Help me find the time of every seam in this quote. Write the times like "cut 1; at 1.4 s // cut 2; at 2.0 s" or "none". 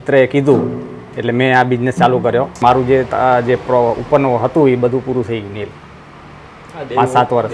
cut 1; at 2.6 s